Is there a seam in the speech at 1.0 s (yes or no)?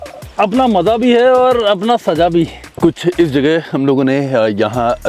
no